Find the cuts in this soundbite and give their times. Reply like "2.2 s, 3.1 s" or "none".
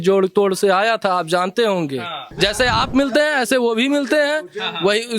2.3 s